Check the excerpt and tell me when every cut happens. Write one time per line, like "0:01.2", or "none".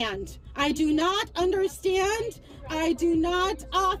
none